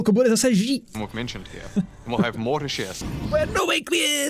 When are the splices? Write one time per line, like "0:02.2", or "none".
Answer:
0:03.0